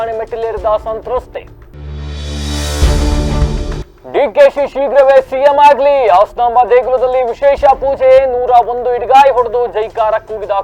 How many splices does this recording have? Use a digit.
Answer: 0